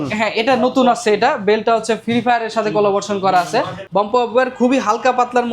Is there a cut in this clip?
yes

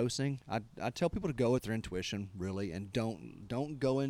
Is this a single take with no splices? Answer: yes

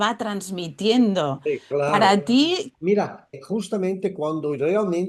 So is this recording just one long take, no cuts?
no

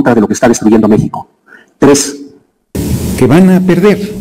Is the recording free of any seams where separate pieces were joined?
no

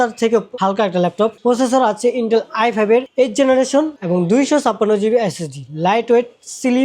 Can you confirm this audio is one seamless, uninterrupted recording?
no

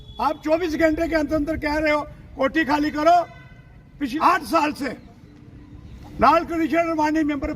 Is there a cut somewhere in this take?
yes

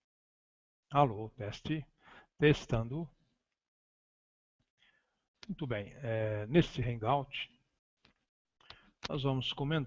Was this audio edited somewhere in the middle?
no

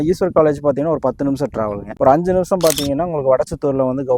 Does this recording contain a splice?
no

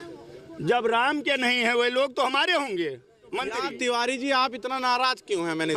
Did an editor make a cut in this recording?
yes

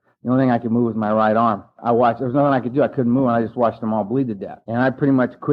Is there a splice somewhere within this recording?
yes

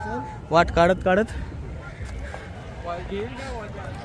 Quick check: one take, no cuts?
yes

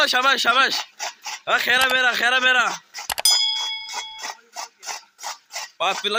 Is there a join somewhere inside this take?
no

